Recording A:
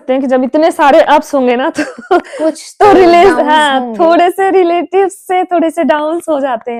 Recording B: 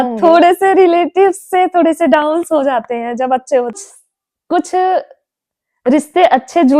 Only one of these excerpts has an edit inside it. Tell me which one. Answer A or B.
B